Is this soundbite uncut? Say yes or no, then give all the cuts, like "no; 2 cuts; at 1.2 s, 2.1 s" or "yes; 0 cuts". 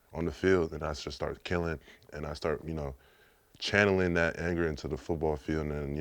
yes; 0 cuts